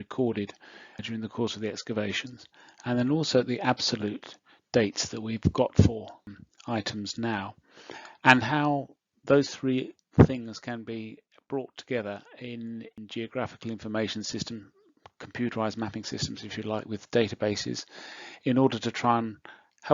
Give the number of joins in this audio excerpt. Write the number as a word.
three